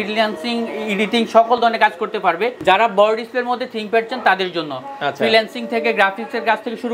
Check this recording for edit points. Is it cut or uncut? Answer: cut